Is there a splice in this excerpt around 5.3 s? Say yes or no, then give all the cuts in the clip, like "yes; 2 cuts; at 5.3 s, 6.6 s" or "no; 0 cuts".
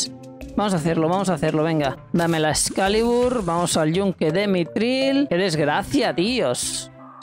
yes; 2 cuts; at 2.0 s, 5.3 s